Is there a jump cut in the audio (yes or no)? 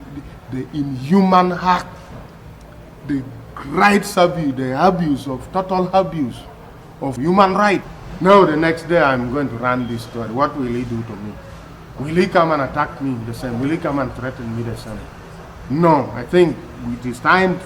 no